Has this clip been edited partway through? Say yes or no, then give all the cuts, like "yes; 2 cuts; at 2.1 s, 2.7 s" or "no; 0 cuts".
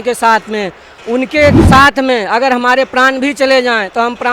yes; 1 cut; at 1.6 s